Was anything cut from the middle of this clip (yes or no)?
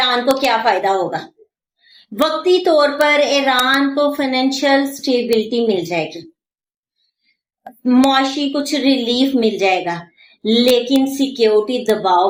no